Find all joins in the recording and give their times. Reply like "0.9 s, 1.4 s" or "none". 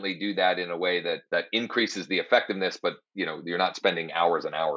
1.2 s